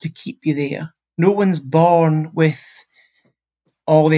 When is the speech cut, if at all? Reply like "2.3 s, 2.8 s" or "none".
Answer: 1.0 s